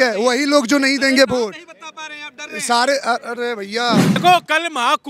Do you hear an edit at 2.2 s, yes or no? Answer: no